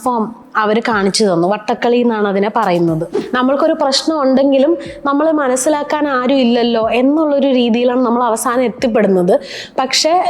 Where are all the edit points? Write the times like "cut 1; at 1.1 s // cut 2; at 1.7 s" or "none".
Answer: cut 1; at 3.2 s